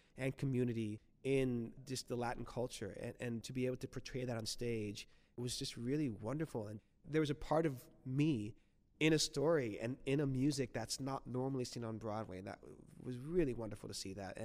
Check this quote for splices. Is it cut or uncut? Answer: cut